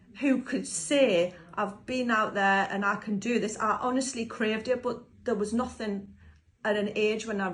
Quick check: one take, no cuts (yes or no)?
yes